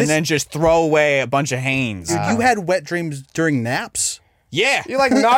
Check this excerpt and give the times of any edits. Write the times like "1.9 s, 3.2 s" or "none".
2.1 s

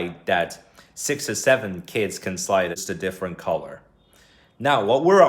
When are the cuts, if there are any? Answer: 2.8 s

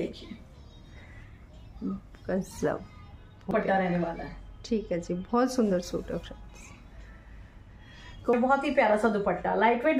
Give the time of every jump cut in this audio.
3.5 s, 8.3 s

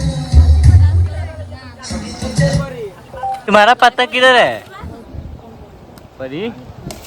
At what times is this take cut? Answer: 3.4 s

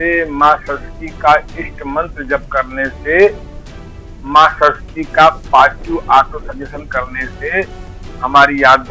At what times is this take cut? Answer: none

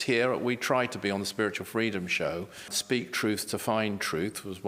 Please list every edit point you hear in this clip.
2.8 s

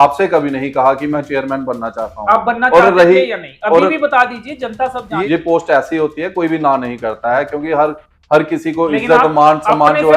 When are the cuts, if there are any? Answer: 5.2 s

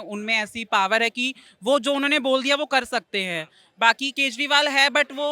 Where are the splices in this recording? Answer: none

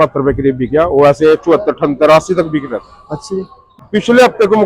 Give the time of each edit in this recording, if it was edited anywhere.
3.6 s

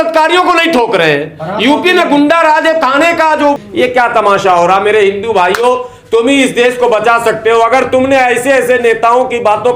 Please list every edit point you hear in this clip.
3.7 s

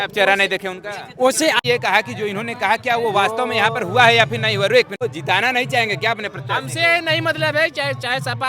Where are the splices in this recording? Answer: 1.6 s, 5.0 s

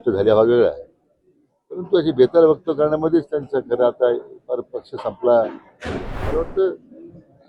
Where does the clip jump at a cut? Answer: 6.1 s

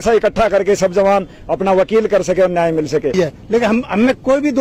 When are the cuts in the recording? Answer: 3.1 s

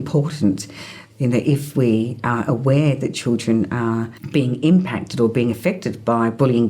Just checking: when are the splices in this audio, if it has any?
1.0 s, 4.1 s

